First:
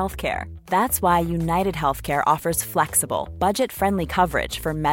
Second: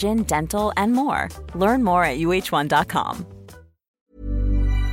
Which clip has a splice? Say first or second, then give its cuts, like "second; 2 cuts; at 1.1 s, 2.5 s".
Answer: second; 1 cut; at 4.0 s